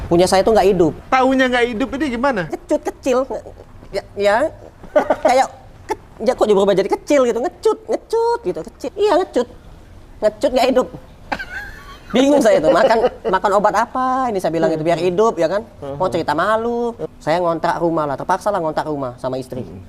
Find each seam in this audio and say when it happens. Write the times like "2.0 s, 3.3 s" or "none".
1.0 s, 2.6 s, 8.9 s, 17.0 s